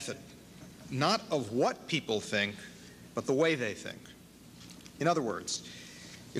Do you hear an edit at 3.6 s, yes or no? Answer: yes